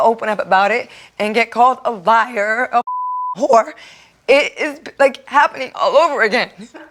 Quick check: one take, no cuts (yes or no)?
yes